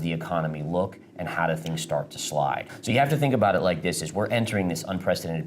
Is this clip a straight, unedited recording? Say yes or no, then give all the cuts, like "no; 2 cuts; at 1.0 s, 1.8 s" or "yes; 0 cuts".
no; 1 cut; at 2.7 s